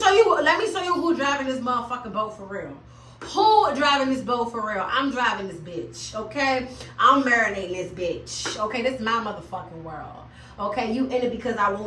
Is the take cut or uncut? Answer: uncut